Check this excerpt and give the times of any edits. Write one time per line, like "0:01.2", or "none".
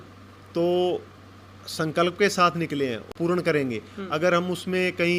0:03.1